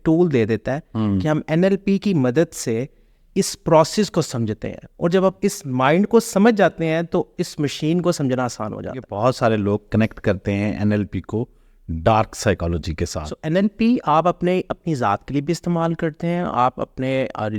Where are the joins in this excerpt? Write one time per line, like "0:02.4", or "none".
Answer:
0:09.1
0:13.3